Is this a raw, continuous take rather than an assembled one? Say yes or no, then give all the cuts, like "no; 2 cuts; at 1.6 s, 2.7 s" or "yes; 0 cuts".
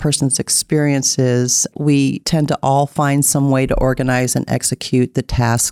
no; 1 cut; at 1.9 s